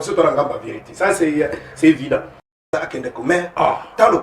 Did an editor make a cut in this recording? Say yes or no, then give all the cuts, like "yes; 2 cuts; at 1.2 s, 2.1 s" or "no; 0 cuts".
yes; 1 cut; at 2.7 s